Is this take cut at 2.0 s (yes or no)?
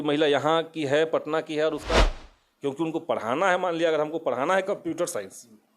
yes